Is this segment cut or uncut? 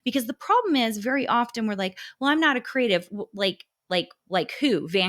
uncut